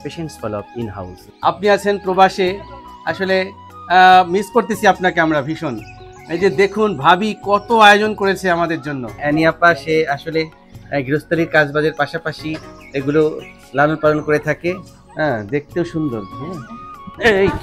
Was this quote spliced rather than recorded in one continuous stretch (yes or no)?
yes